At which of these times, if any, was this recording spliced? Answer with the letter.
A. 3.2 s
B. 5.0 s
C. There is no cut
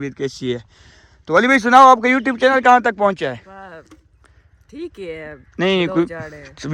C